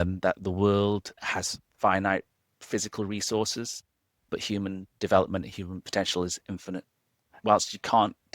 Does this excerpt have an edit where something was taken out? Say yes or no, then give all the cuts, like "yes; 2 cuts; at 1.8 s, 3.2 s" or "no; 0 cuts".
yes; 3 cuts; at 1.2 s, 4.3 s, 7.3 s